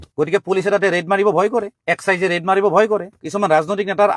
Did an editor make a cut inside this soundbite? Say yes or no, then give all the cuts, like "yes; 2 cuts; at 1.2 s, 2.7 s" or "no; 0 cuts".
yes; 1 cut; at 3.1 s